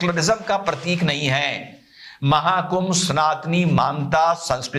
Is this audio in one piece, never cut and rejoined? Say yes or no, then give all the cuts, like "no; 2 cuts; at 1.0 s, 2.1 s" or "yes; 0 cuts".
yes; 0 cuts